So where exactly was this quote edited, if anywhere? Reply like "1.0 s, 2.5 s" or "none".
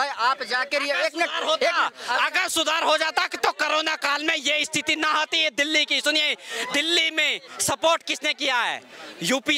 none